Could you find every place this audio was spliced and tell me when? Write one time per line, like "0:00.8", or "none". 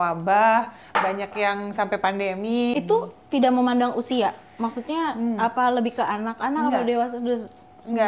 0:02.7